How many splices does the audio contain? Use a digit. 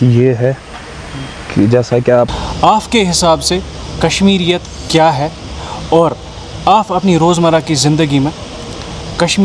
1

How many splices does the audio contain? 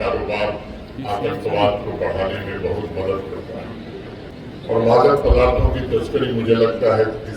1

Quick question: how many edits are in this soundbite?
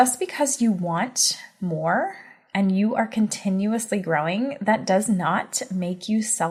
0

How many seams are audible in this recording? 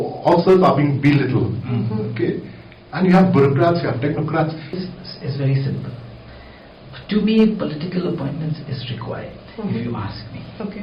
1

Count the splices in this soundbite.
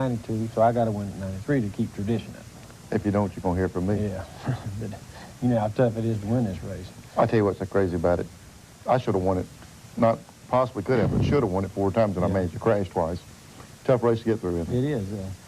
1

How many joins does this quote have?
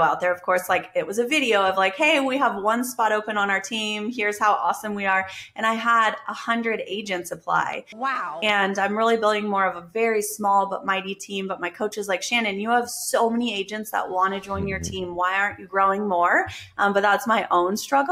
0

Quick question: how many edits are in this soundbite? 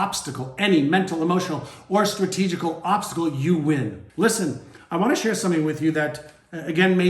1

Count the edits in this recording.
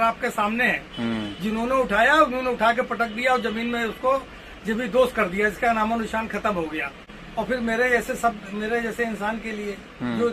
1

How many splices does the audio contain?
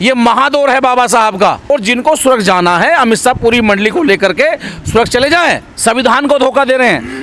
2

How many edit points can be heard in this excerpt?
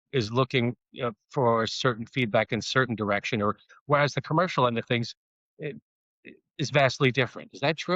1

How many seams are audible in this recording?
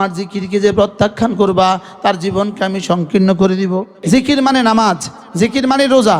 1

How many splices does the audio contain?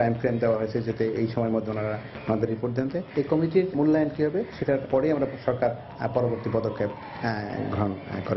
0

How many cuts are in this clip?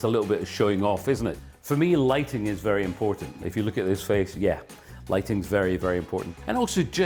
0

